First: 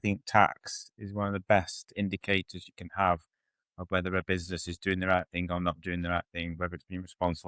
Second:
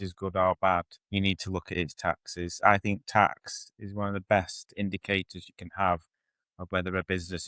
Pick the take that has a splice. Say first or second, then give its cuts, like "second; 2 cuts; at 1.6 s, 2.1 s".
second; 1 cut; at 1.0 s